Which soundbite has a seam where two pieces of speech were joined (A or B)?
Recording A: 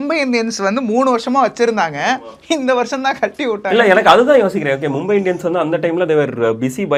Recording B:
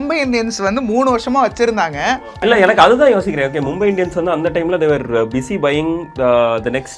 B